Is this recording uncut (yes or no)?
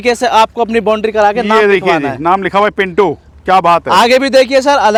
yes